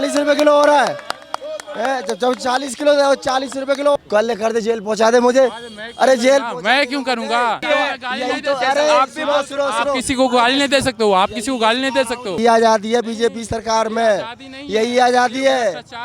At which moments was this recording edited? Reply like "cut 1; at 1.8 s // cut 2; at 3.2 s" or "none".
cut 1; at 4.0 s // cut 2; at 7.6 s // cut 3; at 12.4 s

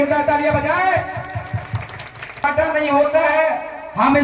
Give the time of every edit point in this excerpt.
cut 1; at 2.4 s

